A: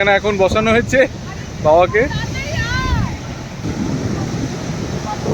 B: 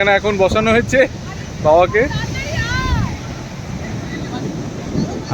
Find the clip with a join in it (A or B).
A